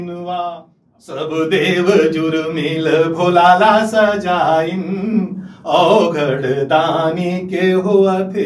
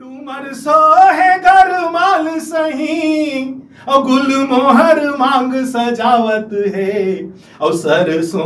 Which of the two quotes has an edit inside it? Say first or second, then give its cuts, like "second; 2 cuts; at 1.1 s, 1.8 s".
first; 1 cut; at 1.4 s